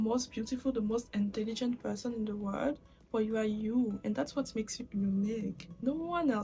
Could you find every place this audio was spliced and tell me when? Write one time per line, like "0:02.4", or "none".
none